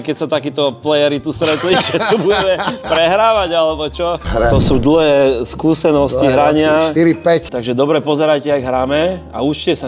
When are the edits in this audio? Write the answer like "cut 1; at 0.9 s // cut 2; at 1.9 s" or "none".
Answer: cut 1; at 4.2 s // cut 2; at 7.5 s

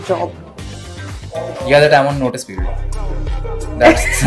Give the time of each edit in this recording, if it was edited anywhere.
none

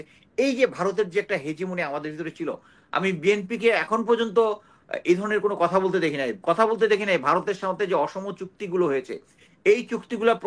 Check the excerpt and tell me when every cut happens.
none

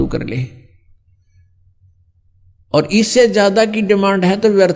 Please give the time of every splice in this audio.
none

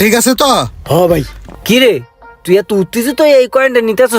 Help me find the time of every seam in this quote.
cut 1; at 1.4 s

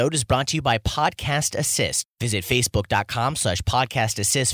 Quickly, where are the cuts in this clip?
cut 1; at 2.0 s

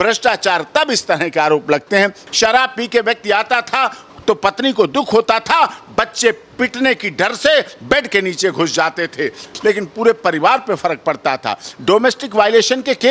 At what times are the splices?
cut 1; at 2.2 s // cut 2; at 9.5 s

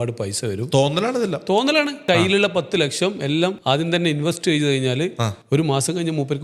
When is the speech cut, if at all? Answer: cut 1; at 2.0 s // cut 2; at 3.6 s // cut 3; at 5.3 s

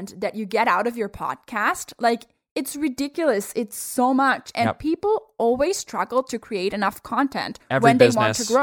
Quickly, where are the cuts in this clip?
none

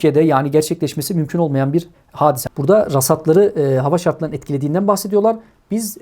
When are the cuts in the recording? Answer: cut 1; at 2.4 s

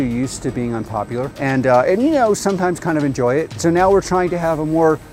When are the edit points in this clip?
cut 1; at 1.3 s // cut 2; at 3.5 s

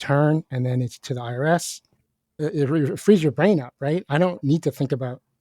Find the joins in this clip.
cut 1; at 2.3 s

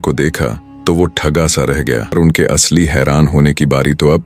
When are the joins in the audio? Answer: cut 1; at 2.1 s

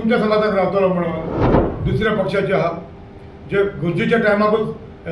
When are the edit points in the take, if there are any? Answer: cut 1; at 1.6 s

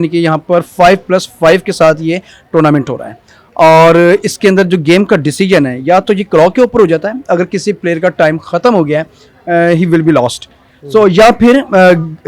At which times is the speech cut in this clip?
none

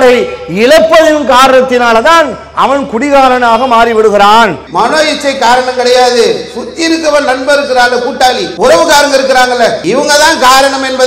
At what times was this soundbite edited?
cut 1; at 4.6 s // cut 2; at 8.5 s // cut 3; at 9.8 s

